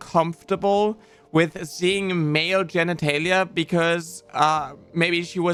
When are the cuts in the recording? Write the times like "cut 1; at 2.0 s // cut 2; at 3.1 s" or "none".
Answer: none